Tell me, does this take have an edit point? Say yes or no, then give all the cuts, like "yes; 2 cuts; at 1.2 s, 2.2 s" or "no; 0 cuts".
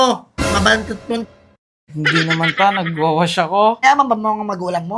yes; 1 cut; at 3.8 s